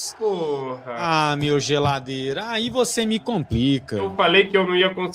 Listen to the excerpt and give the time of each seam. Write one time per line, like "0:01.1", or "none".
0:01.0
0:04.1